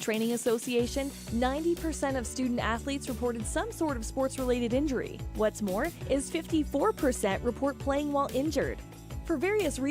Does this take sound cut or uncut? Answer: uncut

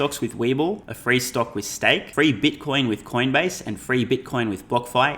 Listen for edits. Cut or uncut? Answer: cut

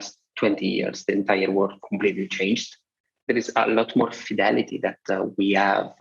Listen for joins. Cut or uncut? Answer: cut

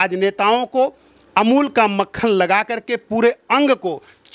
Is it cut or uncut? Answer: uncut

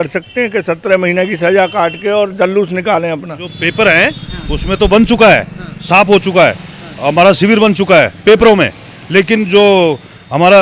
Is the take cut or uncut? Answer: cut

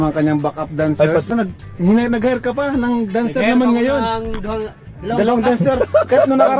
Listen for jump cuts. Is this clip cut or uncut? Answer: cut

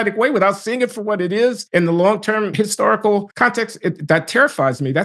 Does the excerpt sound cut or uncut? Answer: cut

